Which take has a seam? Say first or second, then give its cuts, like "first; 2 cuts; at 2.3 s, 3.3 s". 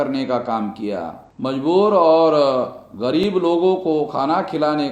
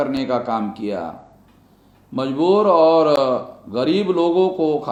first; 1 cut; at 1.2 s